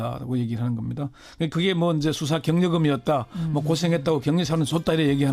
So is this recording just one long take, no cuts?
no; 1 cut; at 4.1 s

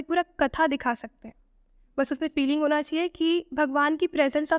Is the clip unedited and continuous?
yes; 0 cuts

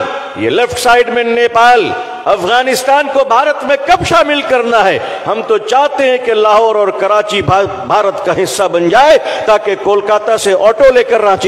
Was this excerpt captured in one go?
yes; 0 cuts

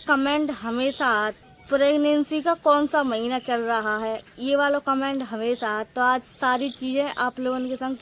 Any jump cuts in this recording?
no; 0 cuts

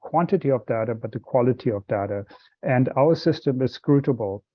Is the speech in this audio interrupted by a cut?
no; 0 cuts

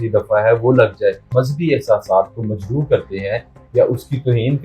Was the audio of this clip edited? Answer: yes; 1 cut; at 1.3 s

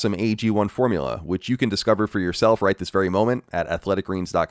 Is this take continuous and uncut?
yes; 0 cuts

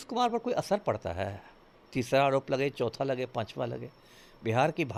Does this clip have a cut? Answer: no; 0 cuts

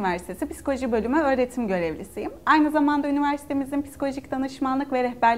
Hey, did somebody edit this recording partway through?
no; 0 cuts

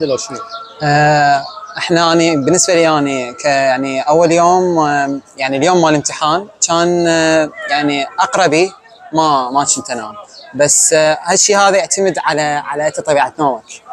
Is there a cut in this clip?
no; 0 cuts

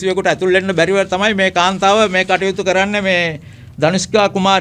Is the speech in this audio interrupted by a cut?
no; 0 cuts

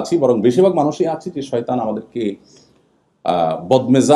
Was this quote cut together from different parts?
no; 0 cuts

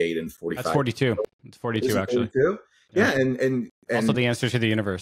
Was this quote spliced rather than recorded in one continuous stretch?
yes; 1 cut; at 3.8 s

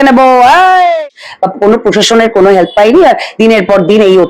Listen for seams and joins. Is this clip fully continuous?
no; 1 cut; at 1.0 s

